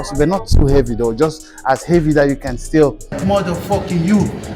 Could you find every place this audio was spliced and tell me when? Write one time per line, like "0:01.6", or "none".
0:03.2